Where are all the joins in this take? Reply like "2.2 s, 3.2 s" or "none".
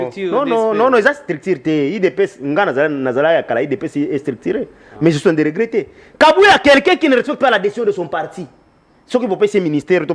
none